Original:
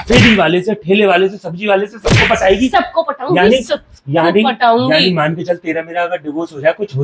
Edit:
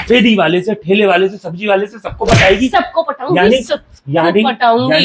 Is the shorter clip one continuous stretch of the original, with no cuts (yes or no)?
yes